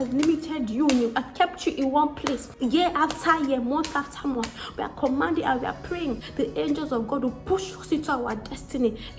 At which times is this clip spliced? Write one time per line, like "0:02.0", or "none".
0:02.5
0:06.2